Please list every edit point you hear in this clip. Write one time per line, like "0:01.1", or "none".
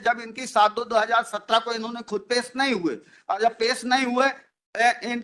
none